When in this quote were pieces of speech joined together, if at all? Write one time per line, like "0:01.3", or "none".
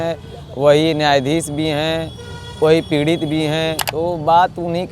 0:03.8